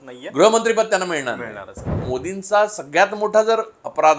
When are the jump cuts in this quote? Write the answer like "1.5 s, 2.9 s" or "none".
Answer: 1.9 s

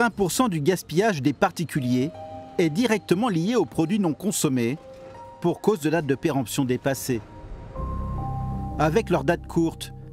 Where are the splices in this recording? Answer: none

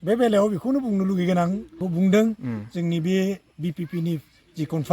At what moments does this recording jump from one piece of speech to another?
1.8 s

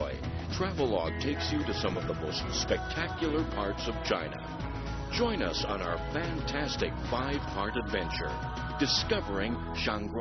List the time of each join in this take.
3.3 s

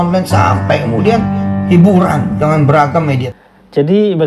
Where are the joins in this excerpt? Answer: 3.3 s

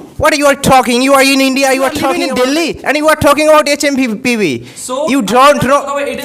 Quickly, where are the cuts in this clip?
2.2 s

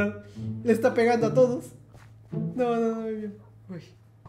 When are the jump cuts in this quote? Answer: none

